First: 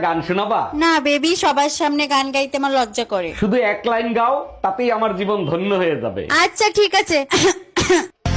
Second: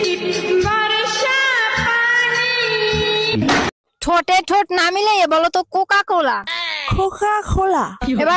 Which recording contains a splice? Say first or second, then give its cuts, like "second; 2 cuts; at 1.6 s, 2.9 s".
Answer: second; 1 cut; at 3.8 s